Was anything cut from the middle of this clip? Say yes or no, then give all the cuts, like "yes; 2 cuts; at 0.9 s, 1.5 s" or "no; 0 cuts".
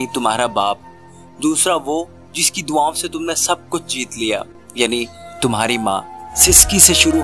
yes; 1 cut; at 6.3 s